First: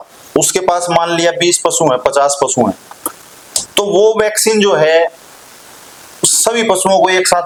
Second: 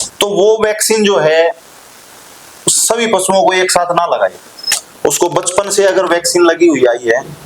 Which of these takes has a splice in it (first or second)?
second